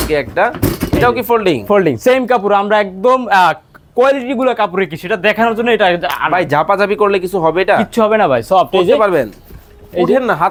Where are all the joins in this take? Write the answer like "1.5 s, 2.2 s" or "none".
none